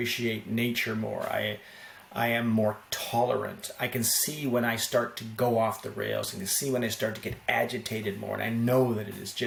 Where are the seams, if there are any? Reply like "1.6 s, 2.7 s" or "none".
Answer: none